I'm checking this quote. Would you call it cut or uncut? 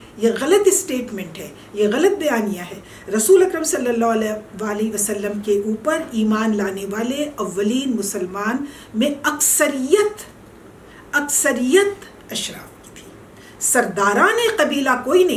uncut